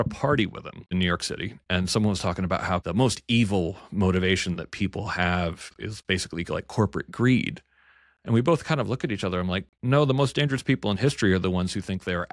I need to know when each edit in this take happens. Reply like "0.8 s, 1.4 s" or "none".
0.9 s, 2.8 s, 5.7 s